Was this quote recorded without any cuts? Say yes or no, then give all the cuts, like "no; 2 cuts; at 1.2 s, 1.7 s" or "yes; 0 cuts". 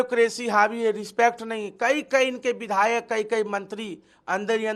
yes; 0 cuts